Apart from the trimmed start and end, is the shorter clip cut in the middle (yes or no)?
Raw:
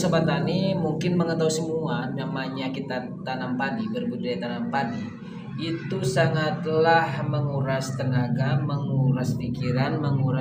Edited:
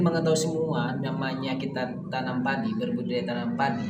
no